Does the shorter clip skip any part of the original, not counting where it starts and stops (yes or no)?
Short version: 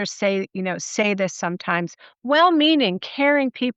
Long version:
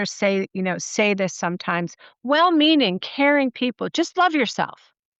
no